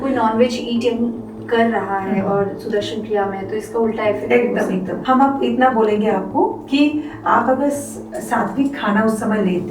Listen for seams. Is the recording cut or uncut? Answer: cut